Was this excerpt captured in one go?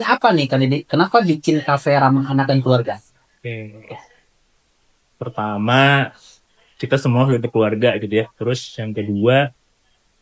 yes; 0 cuts

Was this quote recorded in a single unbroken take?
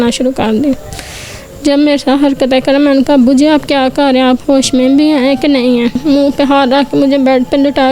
no; 1 cut; at 6.0 s

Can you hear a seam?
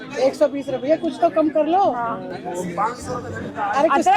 no; 0 cuts

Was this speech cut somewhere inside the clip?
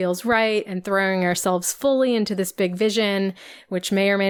no; 0 cuts

